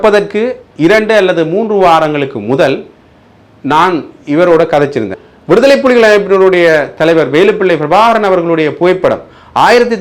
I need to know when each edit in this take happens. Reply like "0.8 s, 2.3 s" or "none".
5.2 s